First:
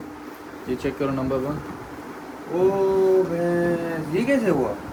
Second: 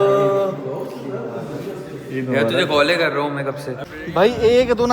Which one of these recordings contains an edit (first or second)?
second